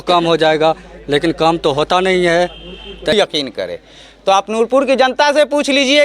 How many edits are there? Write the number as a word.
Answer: one